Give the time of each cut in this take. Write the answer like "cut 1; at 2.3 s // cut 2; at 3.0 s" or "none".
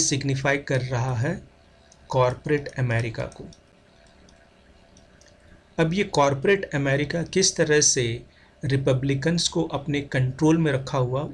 none

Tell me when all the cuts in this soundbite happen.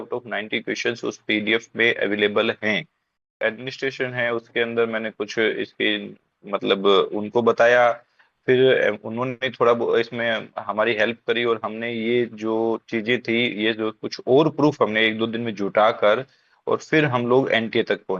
cut 1; at 3.4 s

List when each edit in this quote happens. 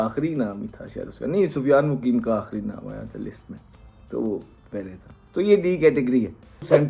none

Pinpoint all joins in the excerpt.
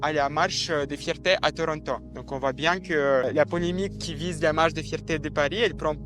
cut 1; at 3.3 s

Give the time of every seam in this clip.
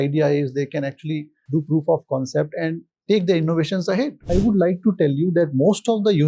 cut 1; at 1.3 s // cut 2; at 4.3 s

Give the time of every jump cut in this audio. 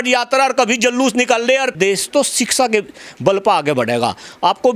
cut 1; at 1.7 s

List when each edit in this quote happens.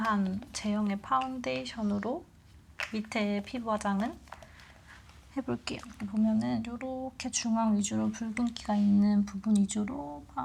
cut 1; at 5.9 s

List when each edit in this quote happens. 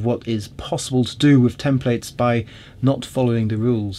none

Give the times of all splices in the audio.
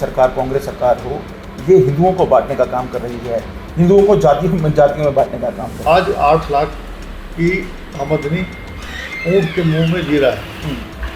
cut 1; at 5.8 s

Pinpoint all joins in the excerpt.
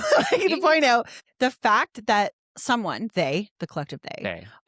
cut 1; at 1.2 s // cut 2; at 2.5 s

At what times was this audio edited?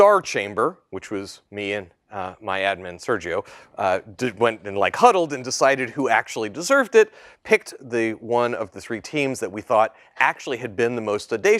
cut 1; at 7.7 s

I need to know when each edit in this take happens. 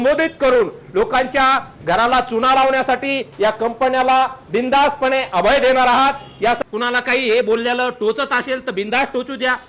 cut 1; at 6.6 s

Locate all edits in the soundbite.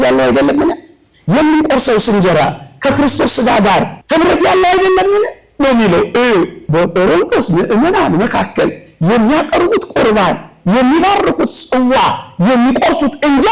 cut 1; at 4.0 s // cut 2; at 6.6 s

